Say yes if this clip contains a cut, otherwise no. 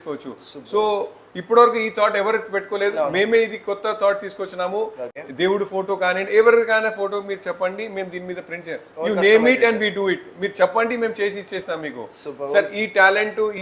no